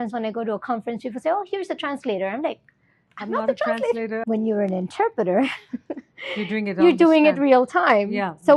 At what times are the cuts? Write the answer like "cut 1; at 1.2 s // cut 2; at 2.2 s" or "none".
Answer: cut 1; at 4.2 s